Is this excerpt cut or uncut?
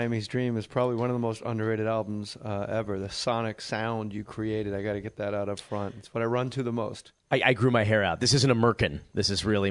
cut